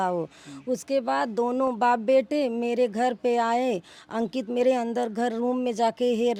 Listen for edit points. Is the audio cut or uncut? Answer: uncut